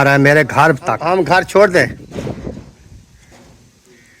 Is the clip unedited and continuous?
no; 1 cut; at 1.0 s

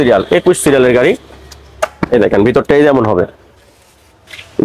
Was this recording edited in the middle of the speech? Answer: no; 0 cuts

